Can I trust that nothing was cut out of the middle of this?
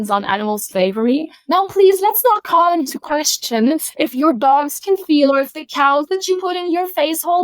no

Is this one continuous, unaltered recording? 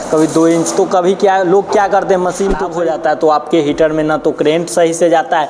no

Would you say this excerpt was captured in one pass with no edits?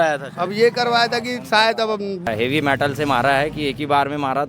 no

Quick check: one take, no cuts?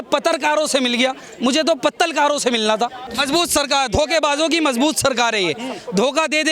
no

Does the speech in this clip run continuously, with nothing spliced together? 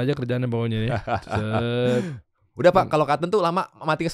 yes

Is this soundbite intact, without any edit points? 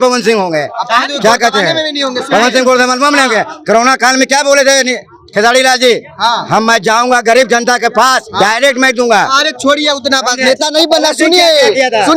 yes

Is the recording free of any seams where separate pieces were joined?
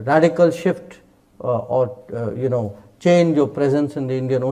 yes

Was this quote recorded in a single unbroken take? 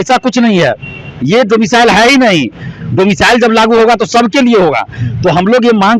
yes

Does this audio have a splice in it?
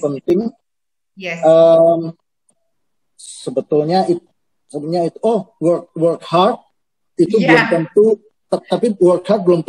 no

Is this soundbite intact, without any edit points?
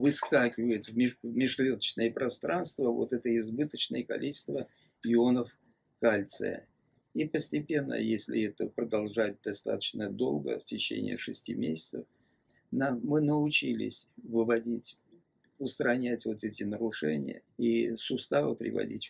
no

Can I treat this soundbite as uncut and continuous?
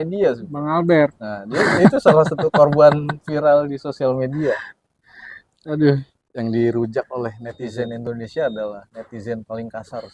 no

